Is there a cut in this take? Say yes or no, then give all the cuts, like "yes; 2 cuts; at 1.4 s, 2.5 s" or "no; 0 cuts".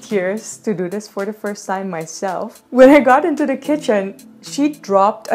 yes; 1 cut; at 2.6 s